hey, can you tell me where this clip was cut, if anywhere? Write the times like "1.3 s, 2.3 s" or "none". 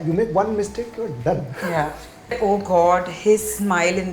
2.3 s